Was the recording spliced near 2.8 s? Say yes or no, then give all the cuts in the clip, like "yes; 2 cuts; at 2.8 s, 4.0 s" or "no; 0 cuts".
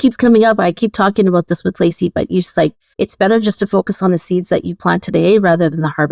yes; 1 cut; at 2.8 s